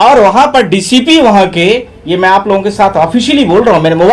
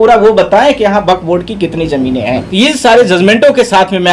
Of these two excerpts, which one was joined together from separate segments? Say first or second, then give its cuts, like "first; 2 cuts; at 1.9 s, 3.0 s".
second; 1 cut; at 2.4 s